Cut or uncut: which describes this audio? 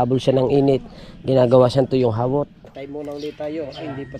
cut